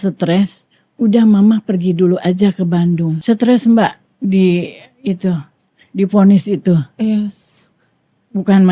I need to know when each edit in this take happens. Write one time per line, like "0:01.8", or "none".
0:03.2